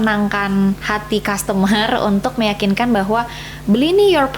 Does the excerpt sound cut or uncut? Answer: cut